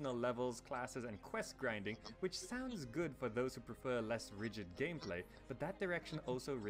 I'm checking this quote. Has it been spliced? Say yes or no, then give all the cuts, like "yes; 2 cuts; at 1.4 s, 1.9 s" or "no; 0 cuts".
no; 0 cuts